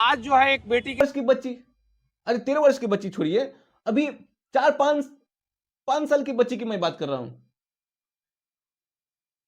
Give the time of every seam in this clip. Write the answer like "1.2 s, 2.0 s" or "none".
1.0 s